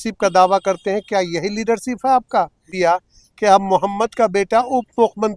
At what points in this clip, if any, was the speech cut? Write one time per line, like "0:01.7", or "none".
0:02.7